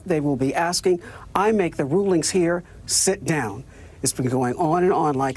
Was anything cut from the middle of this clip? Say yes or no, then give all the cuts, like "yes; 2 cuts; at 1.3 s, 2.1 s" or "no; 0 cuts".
no; 0 cuts